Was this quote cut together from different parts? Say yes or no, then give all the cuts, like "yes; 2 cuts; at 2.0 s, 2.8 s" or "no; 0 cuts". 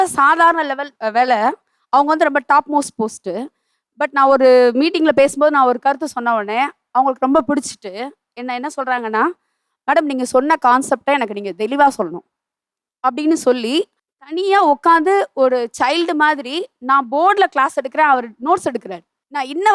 no; 0 cuts